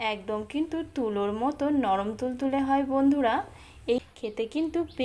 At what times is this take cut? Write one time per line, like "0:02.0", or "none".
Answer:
0:03.8